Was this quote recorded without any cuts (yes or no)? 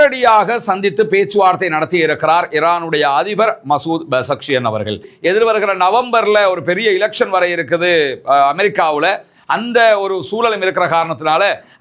no